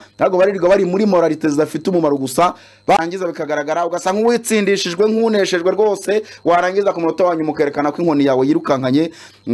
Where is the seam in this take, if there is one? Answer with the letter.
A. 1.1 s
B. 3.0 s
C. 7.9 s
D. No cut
B